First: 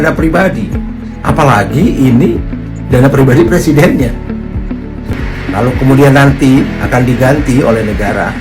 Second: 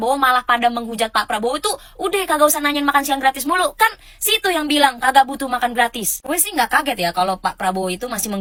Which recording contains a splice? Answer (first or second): first